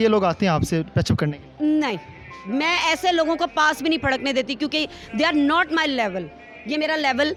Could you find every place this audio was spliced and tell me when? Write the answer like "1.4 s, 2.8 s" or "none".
none